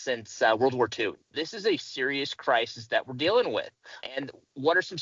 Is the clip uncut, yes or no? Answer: no